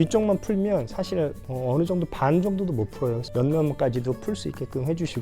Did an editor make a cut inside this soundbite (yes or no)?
yes